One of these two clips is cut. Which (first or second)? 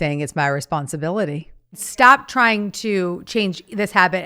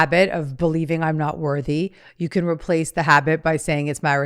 first